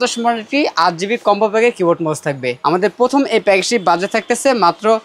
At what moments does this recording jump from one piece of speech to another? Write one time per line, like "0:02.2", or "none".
none